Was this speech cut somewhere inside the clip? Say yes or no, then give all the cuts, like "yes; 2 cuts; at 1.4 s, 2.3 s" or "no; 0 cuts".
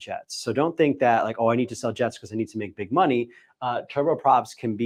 no; 0 cuts